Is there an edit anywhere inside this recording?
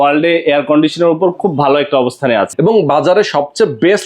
yes; 1 cut; at 2.5 s

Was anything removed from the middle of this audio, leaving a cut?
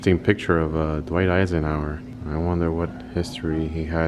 yes; 1 cut; at 2.1 s

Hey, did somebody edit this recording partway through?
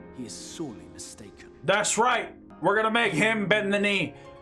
yes; 1 cut; at 2.4 s

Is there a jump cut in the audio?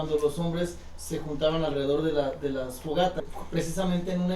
yes; 1 cut; at 3.2 s

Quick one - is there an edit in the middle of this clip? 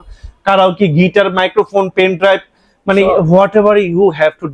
no; 0 cuts

